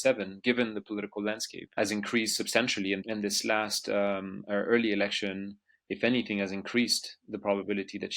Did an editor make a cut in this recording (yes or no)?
yes